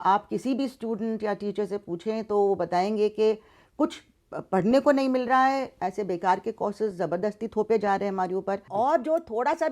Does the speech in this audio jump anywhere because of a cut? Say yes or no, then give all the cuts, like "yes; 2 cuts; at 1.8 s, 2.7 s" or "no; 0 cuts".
yes; 1 cut; at 8.6 s